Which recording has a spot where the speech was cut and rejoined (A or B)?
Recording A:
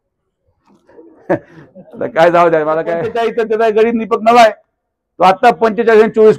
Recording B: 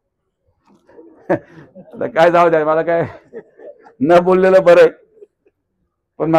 A